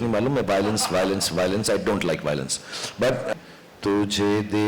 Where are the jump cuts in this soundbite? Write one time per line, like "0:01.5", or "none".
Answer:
0:03.3